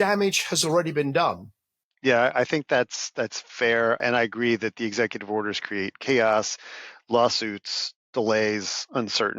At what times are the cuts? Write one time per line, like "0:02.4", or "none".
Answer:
0:04.0

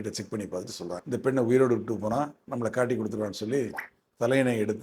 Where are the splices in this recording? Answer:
0:01.0

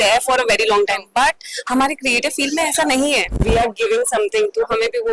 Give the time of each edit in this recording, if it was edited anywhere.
0:03.4

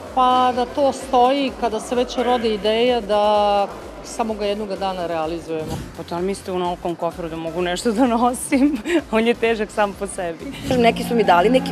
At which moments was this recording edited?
0:05.7
0:10.7

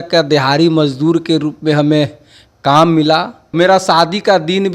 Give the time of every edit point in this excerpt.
0:03.5

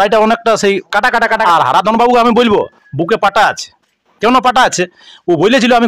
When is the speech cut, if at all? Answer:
0:01.4

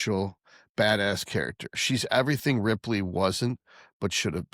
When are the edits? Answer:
none

